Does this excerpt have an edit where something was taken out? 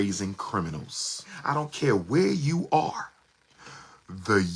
yes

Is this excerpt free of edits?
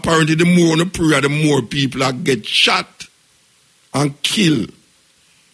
yes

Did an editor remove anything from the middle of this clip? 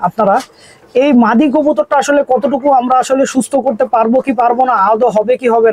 no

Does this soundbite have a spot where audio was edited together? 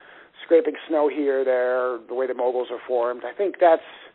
no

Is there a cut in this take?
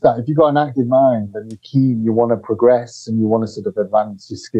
no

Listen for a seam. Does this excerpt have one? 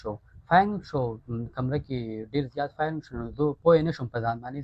no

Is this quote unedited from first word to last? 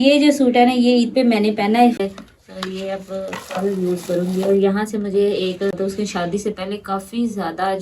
no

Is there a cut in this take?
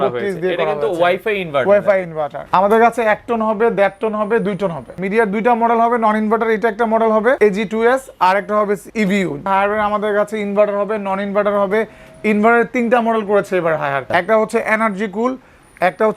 yes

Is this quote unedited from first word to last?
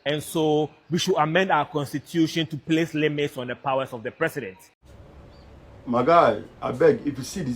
no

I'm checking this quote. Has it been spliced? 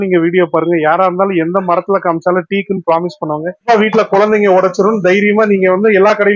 yes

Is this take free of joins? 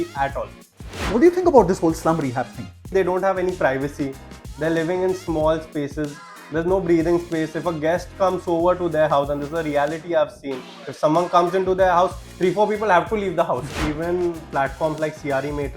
no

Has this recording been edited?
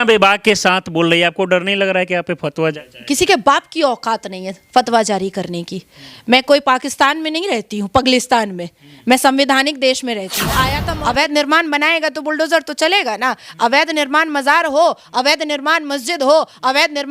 yes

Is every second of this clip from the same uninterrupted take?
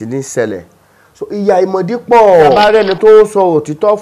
no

